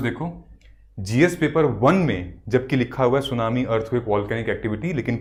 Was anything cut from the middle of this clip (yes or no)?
no